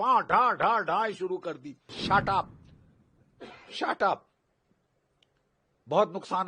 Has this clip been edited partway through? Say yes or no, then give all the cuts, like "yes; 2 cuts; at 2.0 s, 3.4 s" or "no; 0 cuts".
yes; 1 cut; at 2.0 s